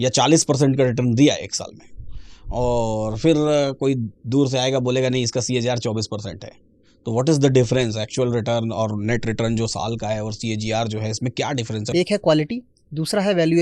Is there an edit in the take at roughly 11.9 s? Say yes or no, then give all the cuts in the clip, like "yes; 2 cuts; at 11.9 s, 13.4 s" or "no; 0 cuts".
yes; 1 cut; at 11.9 s